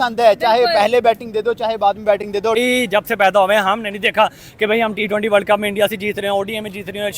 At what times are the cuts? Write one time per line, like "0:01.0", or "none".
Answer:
0:02.6